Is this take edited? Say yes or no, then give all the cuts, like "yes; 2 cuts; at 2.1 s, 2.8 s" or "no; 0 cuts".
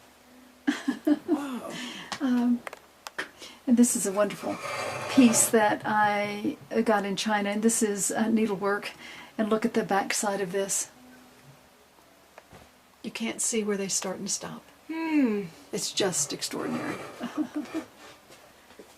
yes; 1 cut; at 10.6 s